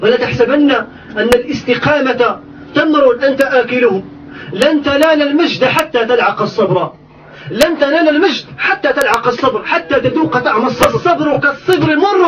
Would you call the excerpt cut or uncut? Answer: cut